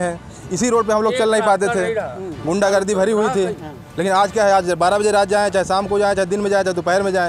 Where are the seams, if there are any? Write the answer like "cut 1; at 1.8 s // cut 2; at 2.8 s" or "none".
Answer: none